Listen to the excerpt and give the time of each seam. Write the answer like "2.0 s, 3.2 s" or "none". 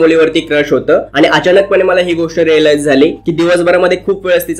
none

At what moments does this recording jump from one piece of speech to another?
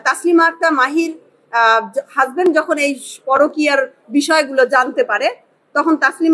none

